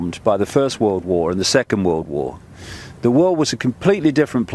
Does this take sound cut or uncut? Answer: cut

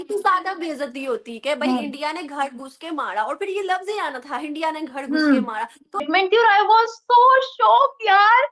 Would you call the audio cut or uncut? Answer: cut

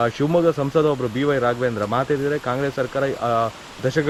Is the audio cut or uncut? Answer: uncut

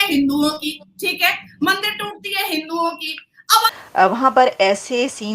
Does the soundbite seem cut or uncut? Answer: cut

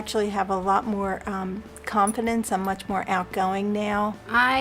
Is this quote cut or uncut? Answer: uncut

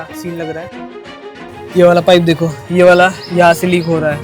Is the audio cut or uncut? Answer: cut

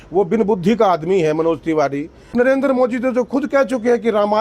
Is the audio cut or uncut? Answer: cut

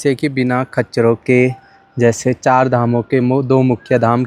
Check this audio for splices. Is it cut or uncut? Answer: uncut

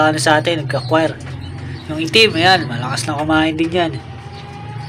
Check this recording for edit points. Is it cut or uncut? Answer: uncut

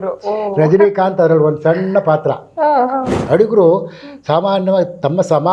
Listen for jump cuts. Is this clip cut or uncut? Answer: cut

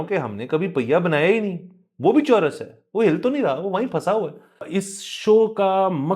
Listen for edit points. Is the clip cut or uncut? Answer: cut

